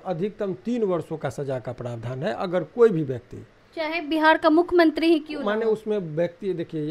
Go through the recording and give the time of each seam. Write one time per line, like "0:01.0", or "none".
none